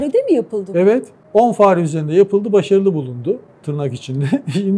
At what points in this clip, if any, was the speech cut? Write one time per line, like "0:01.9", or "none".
0:01.2

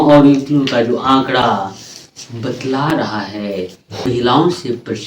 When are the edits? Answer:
0:04.1

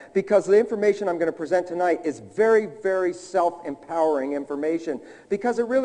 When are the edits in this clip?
none

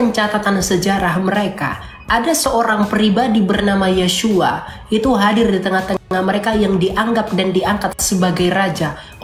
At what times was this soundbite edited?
none

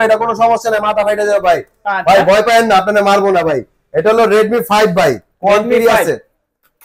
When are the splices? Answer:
none

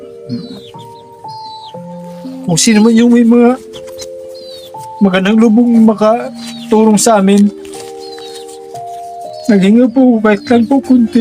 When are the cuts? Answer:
0:07.6
0:09.5

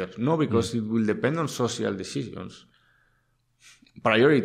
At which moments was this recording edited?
none

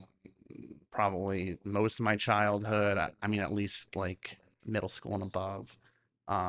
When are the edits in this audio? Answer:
none

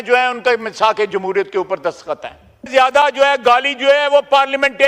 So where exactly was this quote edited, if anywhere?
0:02.7

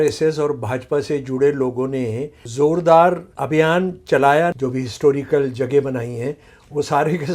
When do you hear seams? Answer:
0:02.4
0:03.3
0:04.5

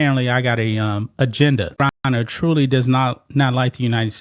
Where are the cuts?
0:02.1

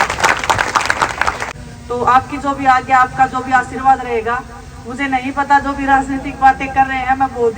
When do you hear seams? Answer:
0:01.5

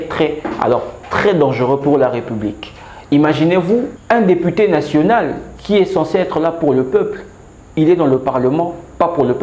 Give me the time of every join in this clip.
0:04.0

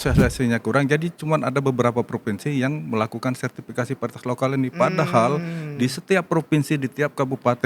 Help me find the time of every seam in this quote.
none

